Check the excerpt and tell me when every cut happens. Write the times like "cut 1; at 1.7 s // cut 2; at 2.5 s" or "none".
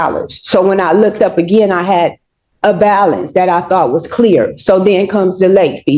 none